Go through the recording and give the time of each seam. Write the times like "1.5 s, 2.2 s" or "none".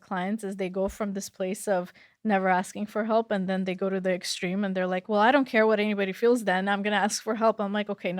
none